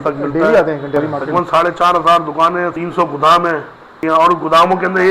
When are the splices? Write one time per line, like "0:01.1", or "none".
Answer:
0:01.0
0:02.7
0:03.8